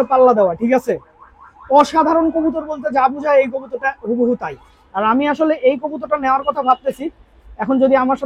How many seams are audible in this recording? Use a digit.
1